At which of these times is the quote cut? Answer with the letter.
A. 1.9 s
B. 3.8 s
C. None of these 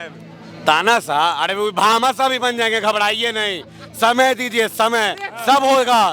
C